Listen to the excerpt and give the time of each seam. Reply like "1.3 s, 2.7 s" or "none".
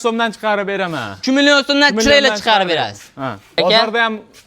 3.6 s